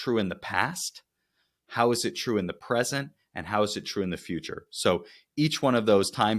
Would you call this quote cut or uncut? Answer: uncut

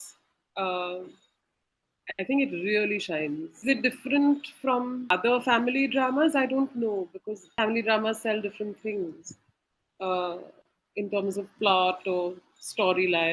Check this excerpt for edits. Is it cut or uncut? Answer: uncut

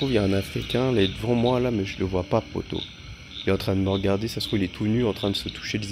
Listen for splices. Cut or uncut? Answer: uncut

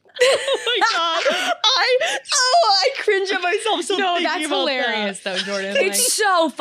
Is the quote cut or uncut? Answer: uncut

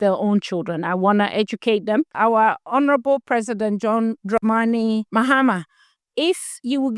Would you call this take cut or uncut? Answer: cut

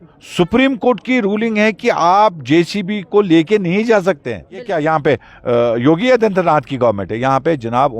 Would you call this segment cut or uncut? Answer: cut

